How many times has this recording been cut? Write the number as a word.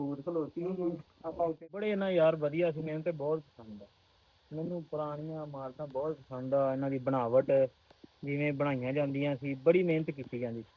one